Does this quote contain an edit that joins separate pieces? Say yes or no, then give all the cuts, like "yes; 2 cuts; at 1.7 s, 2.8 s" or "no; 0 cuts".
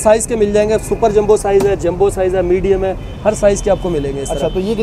no; 0 cuts